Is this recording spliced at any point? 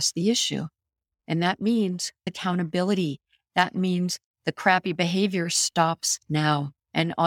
yes; 1 cut; at 2.3 s

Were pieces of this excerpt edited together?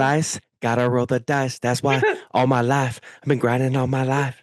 no; 0 cuts

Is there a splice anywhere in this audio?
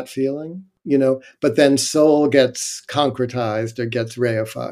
no; 0 cuts

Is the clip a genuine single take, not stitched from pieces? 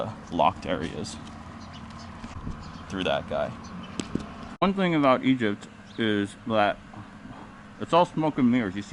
yes; 0 cuts

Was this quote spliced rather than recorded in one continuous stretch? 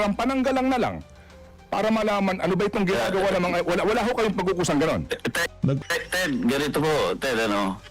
yes; 1 cut; at 5.8 s

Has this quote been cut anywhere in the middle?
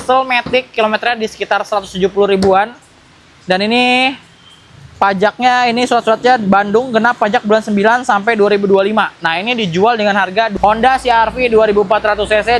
yes; 1 cut; at 10.5 s

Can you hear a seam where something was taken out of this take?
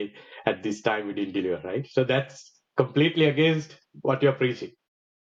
no; 0 cuts

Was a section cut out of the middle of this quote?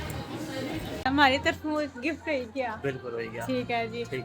yes; 1 cut; at 1.0 s

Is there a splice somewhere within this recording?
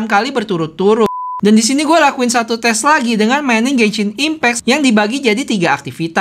yes; 2 cuts; at 1.2 s, 4.6 s

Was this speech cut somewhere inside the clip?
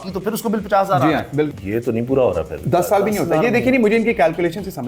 yes; 1 cut; at 1.5 s

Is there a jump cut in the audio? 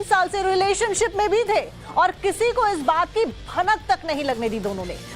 yes; 1 cut; at 3.1 s

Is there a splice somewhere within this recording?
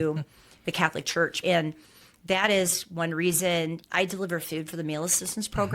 yes; 2 cuts; at 1.4 s, 3.8 s

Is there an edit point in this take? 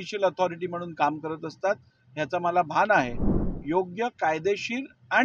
yes; 1 cut; at 3.5 s

